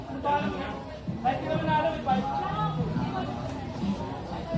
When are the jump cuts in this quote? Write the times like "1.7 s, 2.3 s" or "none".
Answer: none